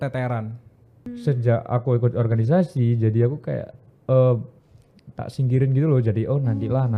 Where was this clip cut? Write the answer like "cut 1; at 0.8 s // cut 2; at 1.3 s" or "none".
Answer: cut 1; at 1.1 s